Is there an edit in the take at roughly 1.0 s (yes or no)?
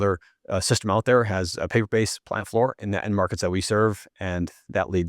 no